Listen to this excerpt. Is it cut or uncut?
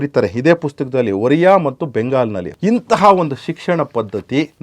cut